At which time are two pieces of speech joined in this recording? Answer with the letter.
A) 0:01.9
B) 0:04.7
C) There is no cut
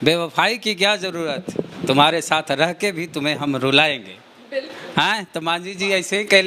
C